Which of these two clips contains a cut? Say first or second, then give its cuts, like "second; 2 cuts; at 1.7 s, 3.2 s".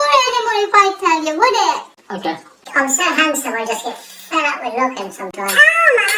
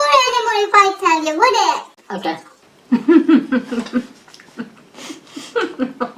first; 1 cut; at 2.6 s